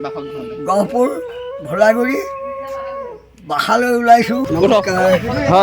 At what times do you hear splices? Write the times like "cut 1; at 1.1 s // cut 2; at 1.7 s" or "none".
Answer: cut 1; at 4.5 s